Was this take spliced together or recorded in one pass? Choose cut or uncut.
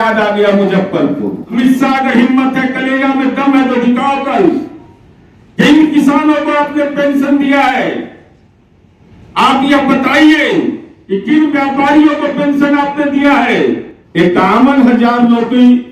cut